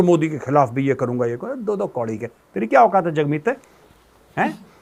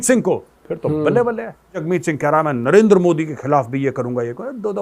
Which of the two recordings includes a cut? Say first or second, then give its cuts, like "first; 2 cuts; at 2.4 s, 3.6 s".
second; 1 cut; at 1.8 s